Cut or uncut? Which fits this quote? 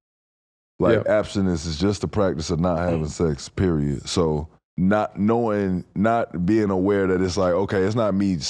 cut